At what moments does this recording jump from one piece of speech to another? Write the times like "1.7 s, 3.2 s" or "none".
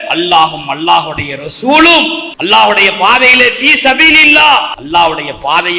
2.3 s, 4.8 s